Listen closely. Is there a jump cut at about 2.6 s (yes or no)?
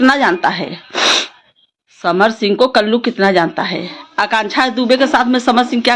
no